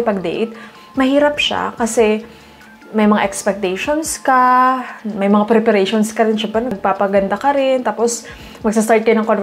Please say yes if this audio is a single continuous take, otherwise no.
yes